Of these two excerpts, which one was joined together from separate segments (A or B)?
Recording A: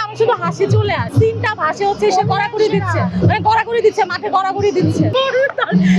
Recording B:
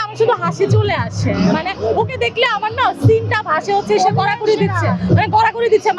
A